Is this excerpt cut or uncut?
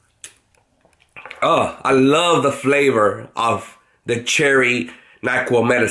uncut